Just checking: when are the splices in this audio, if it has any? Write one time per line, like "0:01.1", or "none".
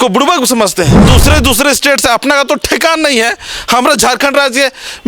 0:01.0